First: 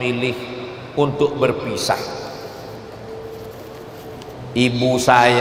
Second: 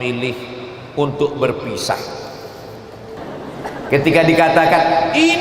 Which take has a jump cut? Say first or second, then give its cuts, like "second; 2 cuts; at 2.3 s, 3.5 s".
second; 1 cut; at 3.2 s